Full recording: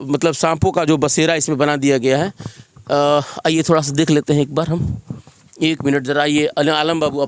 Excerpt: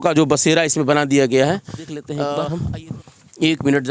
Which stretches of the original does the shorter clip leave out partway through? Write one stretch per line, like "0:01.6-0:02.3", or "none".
0:03.0-0:04.5